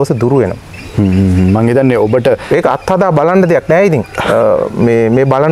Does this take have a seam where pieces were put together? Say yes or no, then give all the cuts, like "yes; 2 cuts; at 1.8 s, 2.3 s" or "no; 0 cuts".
no; 0 cuts